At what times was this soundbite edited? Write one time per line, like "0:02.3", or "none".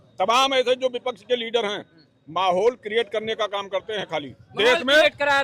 none